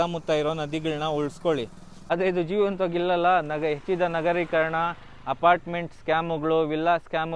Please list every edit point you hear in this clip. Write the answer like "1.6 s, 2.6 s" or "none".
1.9 s